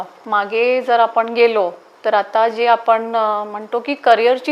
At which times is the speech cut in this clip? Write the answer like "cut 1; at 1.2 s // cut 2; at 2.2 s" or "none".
none